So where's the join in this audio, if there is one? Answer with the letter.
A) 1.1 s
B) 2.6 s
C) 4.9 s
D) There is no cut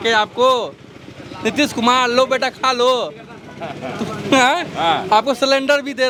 D